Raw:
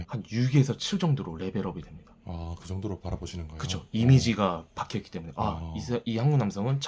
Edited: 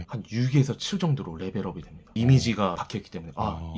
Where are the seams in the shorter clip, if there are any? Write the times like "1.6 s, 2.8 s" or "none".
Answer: 2.1 s, 2.8 s

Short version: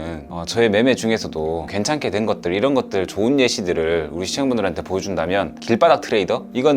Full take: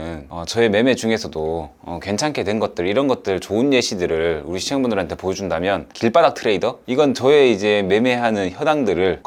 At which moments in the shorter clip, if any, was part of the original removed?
1.7 s

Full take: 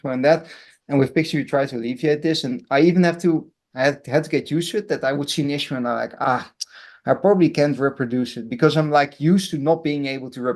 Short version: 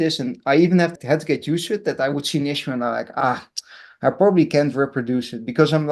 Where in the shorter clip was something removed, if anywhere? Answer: 0.9 s

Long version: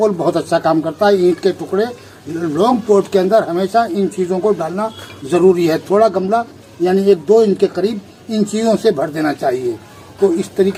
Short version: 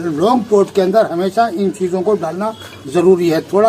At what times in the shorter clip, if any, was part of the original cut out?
none

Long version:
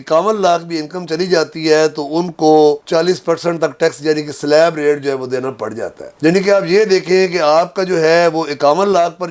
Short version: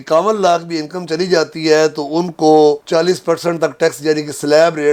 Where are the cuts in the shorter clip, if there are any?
none

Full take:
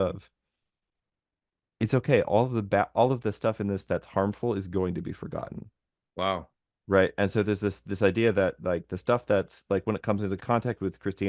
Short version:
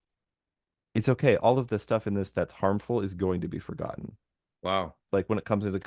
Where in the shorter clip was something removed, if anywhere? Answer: 1.4 s, 5.0 s

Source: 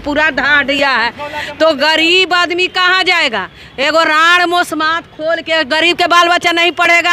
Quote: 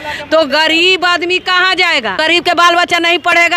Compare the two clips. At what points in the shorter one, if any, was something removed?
2.2 s

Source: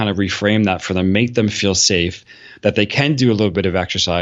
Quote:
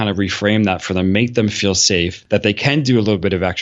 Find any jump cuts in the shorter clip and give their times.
2.2 s

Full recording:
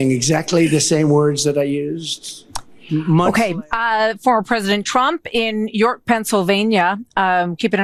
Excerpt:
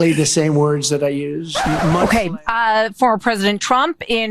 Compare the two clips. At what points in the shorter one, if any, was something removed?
1.5 s

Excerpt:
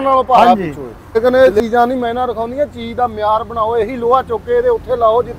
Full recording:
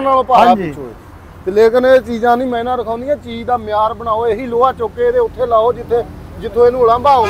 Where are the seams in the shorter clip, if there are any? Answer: 1.2 s

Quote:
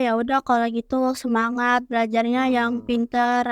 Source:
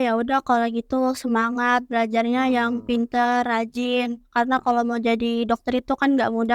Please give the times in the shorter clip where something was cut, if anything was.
none

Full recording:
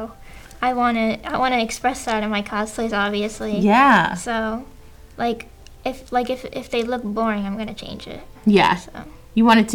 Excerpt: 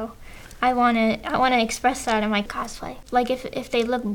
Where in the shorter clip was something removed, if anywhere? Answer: 2.5 s

